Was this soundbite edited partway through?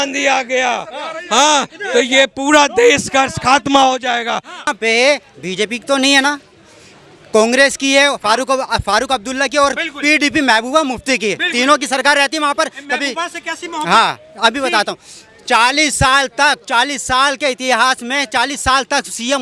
yes; 1 cut; at 4.7 s

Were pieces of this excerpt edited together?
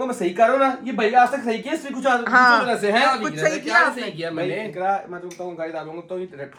no; 0 cuts

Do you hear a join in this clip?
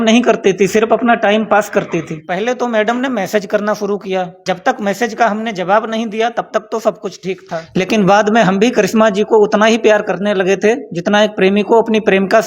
yes; 3 cuts; at 2.2 s, 4.4 s, 7.6 s

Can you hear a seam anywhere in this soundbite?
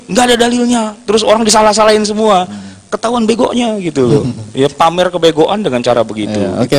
no; 0 cuts

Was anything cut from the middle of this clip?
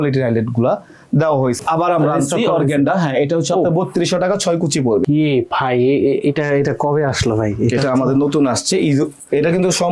yes; 2 cuts; at 1.6 s, 5.0 s

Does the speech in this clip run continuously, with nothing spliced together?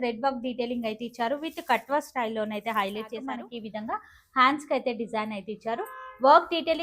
no; 1 cut; at 3.4 s

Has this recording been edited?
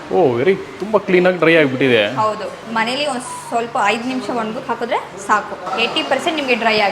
yes; 2 cuts; at 2.6 s, 5.7 s

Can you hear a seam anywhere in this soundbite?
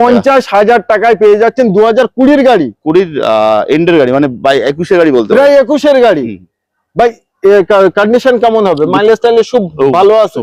no; 0 cuts

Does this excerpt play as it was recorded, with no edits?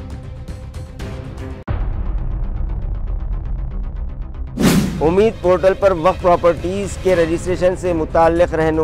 no; 1 cut; at 1.2 s

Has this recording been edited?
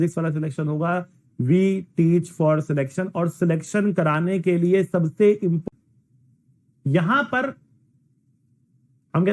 yes; 1 cut; at 5.6 s

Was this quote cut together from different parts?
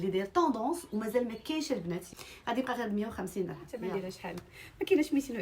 yes; 2 cuts; at 2.1 s, 3.9 s

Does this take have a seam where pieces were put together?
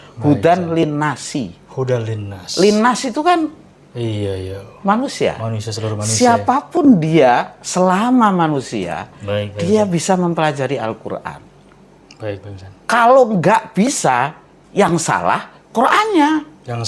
no; 0 cuts

